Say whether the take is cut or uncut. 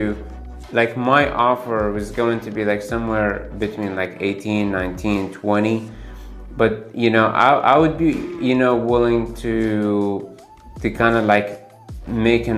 uncut